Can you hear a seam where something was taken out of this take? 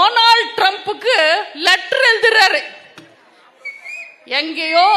no; 0 cuts

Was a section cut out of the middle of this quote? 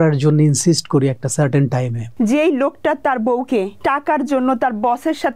yes; 2 cuts; at 2.0 s, 3.7 s

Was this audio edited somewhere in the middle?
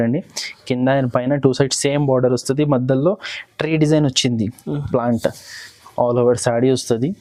no; 0 cuts

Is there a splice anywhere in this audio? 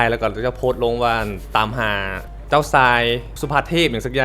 yes; 2 cuts; at 2.2 s, 3.3 s

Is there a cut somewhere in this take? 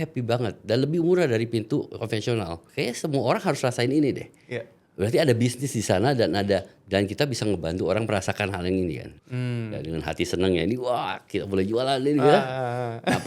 yes; 2 cuts; at 2.7 s, 9.2 s

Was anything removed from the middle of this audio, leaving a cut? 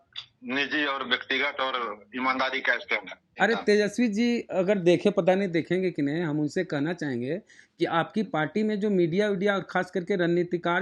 yes; 1 cut; at 3.3 s

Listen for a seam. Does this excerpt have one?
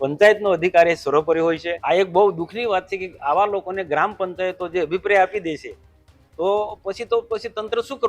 yes; 1 cut; at 1.7 s

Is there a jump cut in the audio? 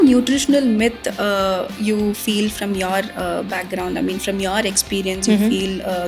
no; 0 cuts

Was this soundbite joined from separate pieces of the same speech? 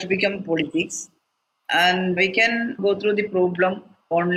no; 0 cuts

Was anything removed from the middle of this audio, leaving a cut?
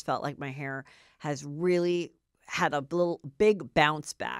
no; 0 cuts

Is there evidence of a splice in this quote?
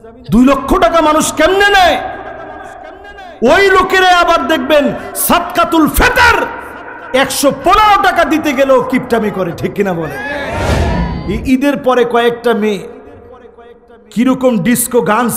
yes; 1 cut; at 11.1 s

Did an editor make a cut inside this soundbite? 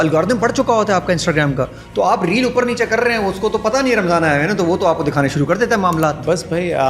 no; 0 cuts

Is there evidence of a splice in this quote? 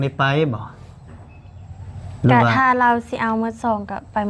no; 0 cuts

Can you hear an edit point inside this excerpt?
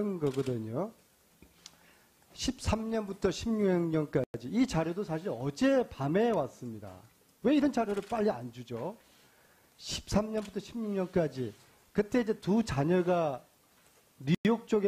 yes; 1 cut; at 1.0 s

